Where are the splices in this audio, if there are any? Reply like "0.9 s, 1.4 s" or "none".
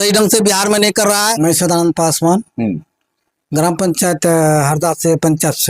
1.3 s